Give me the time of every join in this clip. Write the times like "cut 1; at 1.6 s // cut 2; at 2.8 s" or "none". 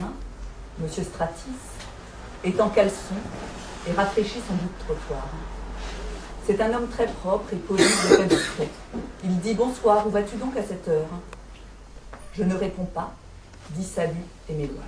cut 1; at 13.6 s